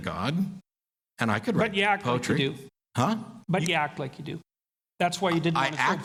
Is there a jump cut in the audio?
no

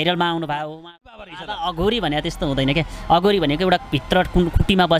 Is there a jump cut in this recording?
yes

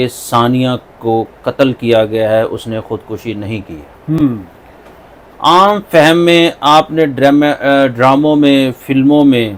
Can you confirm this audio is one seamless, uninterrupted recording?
yes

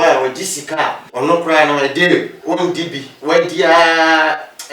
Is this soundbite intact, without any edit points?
no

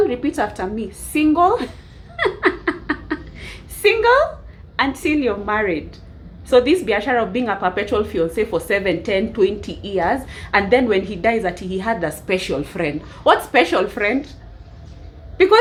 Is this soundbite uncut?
yes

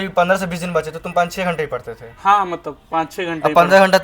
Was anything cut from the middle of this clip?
no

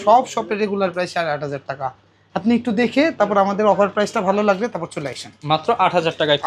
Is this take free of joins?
yes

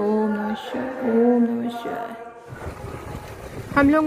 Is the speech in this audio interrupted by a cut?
yes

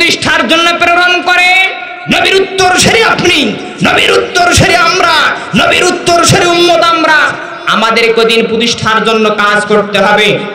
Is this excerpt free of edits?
yes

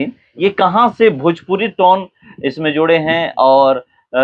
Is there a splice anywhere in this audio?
no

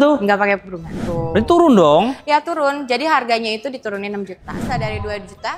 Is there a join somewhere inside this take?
yes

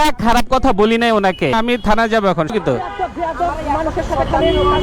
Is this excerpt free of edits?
no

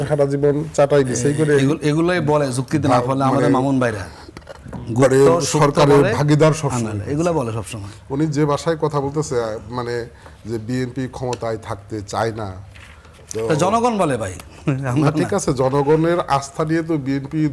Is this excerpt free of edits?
yes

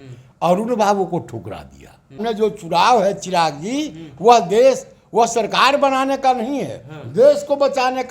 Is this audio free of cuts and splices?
no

